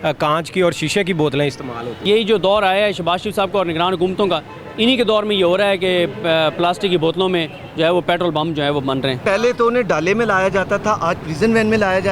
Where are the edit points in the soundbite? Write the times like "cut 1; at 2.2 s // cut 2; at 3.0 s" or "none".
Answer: cut 1; at 2.0 s // cut 2; at 9.2 s